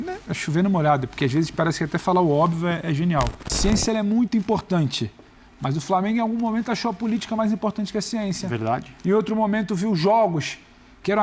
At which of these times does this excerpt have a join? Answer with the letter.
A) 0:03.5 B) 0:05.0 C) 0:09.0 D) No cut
A